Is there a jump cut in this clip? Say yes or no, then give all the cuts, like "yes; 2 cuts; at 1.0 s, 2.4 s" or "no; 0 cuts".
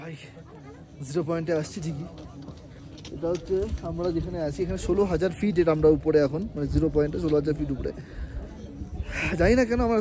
no; 0 cuts